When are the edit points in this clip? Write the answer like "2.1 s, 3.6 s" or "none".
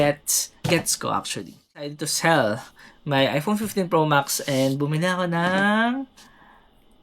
2.0 s